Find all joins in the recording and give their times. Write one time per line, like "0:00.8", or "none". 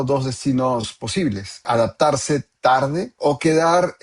0:01.6
0:03.1